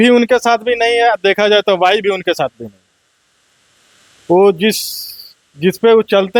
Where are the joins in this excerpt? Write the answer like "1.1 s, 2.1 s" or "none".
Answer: none